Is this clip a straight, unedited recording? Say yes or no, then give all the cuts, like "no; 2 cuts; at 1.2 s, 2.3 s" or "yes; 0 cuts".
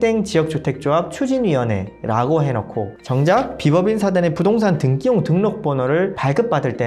yes; 0 cuts